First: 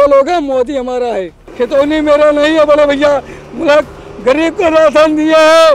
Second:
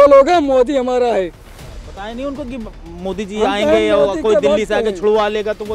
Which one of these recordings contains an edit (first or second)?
first